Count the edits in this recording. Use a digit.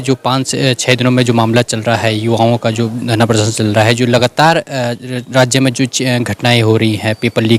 0